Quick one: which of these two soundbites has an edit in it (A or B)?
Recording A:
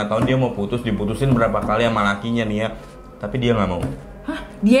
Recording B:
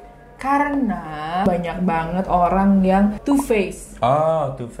B